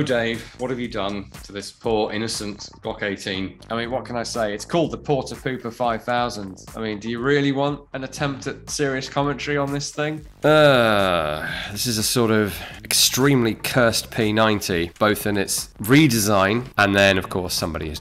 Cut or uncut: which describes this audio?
cut